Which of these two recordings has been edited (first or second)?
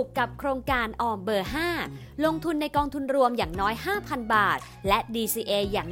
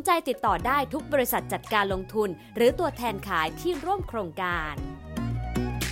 second